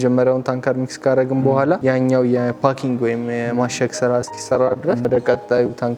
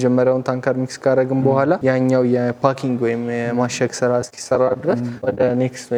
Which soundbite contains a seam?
first; 1 cut; at 5.0 s

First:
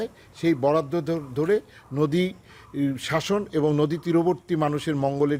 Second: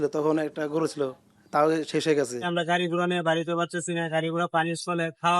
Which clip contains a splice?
second; 1 cut; at 2.5 s

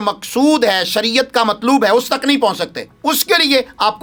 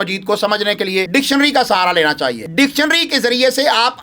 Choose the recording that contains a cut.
second; 2 cuts; at 1.1 s, 2.4 s

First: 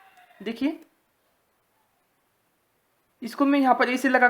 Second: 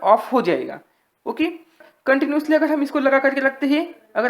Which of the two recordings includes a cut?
second; 1 cut; at 1.9 s

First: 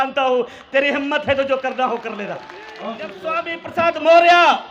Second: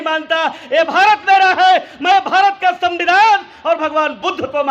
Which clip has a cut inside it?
first; 1 cut; at 3.6 s

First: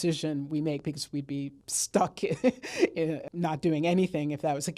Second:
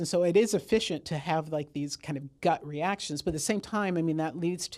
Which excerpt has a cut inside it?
first; 2 cuts; at 1.6 s, 3.2 s

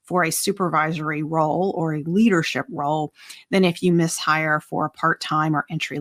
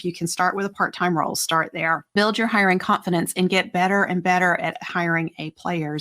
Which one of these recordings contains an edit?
second; 1 cut; at 2.1 s

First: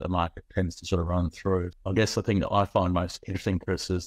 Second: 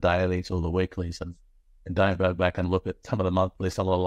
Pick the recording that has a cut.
first; 1 cut; at 1.7 s

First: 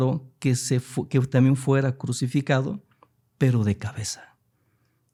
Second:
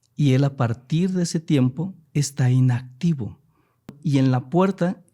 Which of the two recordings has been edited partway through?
second; 1 cut; at 3.9 s

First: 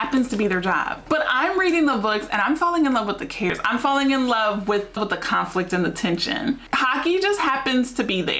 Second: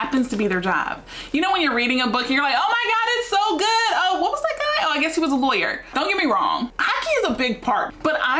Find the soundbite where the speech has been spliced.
first; 4 cuts; at 1.0 s, 3.5 s, 4.9 s, 6.7 s

